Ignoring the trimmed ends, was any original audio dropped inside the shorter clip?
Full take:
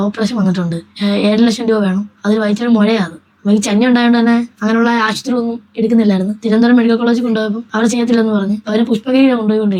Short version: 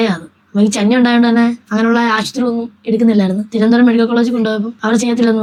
no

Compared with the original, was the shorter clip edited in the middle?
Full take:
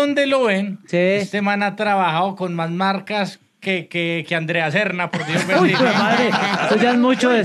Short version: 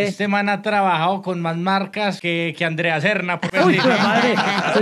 yes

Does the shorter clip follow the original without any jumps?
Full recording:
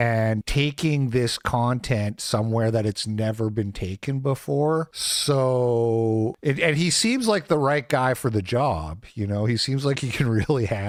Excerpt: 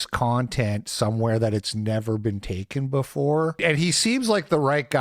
no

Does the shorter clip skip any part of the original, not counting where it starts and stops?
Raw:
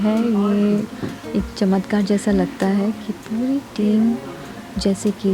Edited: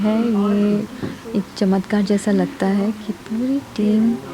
no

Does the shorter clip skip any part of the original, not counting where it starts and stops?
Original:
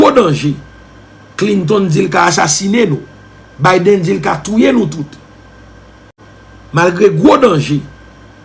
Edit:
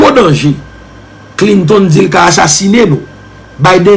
no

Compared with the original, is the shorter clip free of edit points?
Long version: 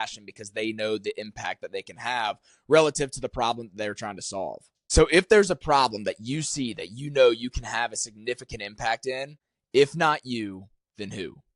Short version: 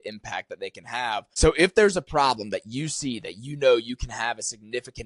no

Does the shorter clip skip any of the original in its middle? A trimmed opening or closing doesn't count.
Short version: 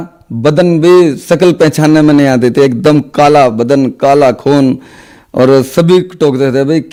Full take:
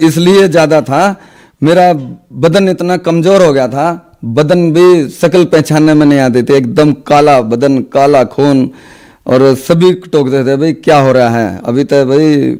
no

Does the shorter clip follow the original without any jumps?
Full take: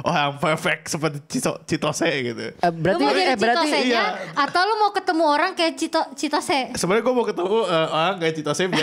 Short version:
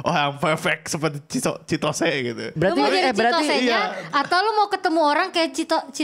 no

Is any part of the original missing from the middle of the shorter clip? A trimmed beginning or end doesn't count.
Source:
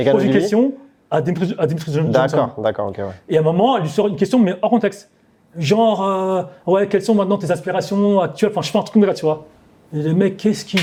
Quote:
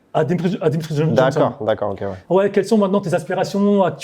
yes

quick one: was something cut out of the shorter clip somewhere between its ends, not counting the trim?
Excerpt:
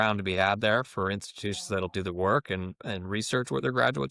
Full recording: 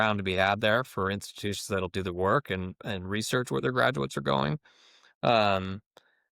no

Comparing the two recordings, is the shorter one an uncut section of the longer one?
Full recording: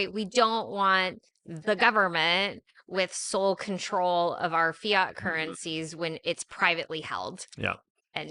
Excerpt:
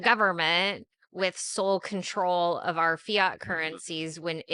yes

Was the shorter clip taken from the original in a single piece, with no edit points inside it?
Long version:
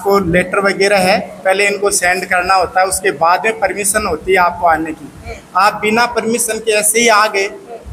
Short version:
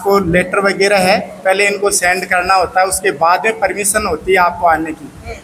yes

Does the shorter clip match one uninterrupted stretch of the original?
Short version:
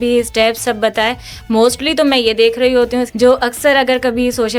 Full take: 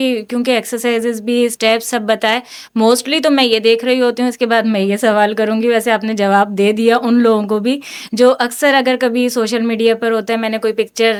no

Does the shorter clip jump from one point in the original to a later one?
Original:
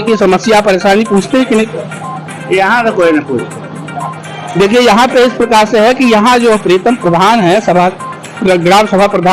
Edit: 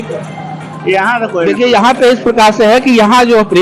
yes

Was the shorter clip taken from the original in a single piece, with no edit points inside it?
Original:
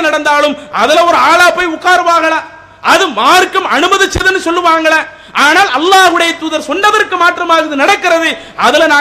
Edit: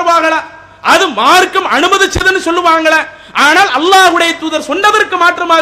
yes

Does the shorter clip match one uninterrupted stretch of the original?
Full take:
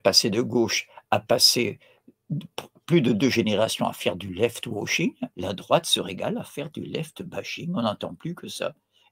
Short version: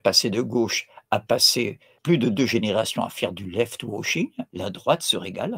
no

